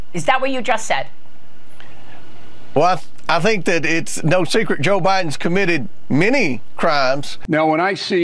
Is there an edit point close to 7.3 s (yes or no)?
yes